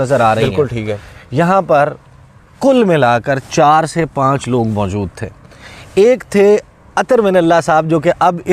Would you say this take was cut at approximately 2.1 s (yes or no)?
no